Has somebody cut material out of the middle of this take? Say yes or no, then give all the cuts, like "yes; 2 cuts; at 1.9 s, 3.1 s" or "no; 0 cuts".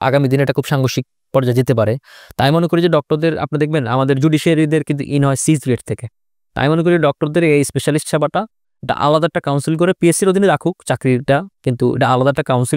no; 0 cuts